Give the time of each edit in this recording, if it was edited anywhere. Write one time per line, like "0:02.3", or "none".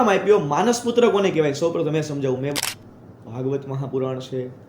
0:02.6